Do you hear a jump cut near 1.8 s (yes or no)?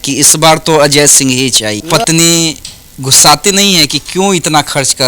yes